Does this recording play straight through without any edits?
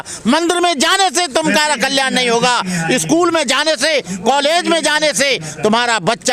yes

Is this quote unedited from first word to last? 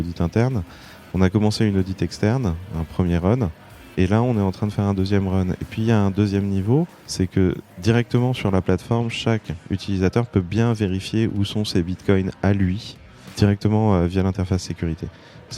no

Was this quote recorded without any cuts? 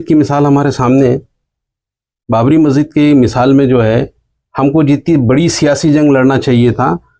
yes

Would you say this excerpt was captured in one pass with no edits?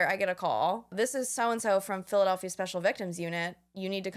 no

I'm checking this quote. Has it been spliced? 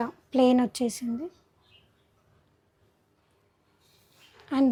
no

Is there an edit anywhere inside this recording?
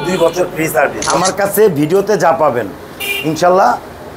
yes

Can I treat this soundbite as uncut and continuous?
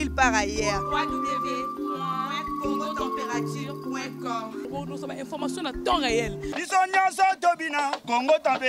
yes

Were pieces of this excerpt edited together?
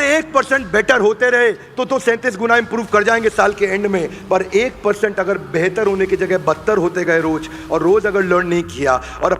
no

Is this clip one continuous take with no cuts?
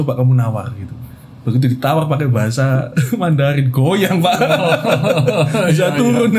yes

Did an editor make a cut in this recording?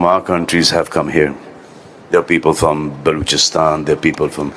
no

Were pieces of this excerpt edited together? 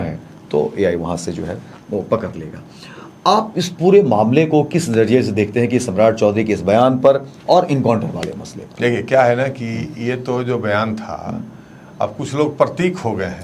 no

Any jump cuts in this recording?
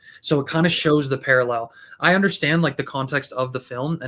no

